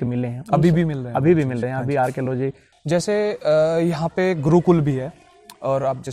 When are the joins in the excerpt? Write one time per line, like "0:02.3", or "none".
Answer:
0:02.7